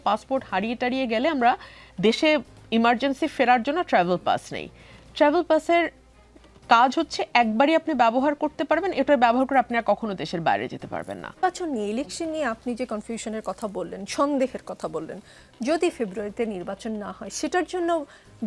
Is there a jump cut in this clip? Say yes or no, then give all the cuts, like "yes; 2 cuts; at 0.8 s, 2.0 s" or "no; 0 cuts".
yes; 1 cut; at 11.4 s